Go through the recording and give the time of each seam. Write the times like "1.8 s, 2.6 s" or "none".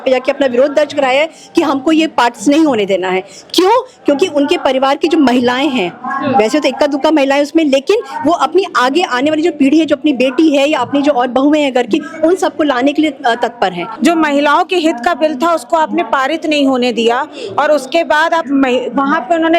13.8 s